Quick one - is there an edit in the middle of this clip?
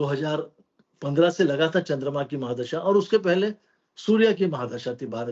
no; 0 cuts

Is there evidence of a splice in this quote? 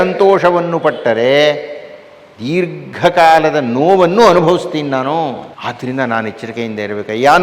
yes; 1 cut; at 5.5 s

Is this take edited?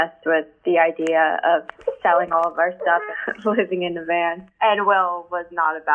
no; 0 cuts

